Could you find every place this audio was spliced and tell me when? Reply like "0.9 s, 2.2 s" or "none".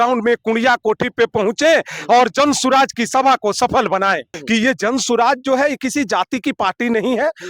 4.3 s